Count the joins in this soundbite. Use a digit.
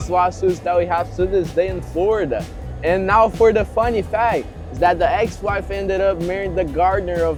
0